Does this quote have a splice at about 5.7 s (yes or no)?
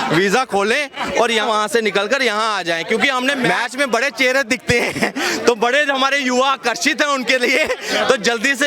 no